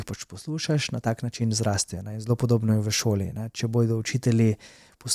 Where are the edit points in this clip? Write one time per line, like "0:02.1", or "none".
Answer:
none